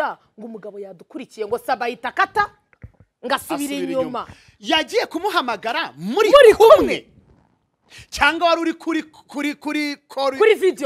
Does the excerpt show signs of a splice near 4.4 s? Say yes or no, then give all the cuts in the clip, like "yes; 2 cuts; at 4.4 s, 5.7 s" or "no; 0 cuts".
no; 0 cuts